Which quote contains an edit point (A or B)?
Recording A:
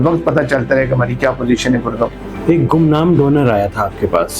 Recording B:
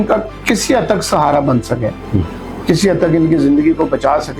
A